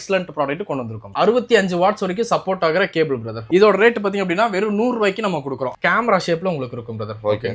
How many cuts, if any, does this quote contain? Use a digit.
2